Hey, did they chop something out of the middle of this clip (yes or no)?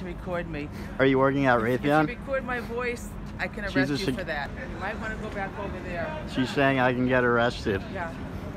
yes